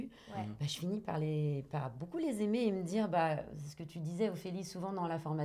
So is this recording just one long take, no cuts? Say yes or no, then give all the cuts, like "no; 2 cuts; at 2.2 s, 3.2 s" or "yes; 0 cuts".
yes; 0 cuts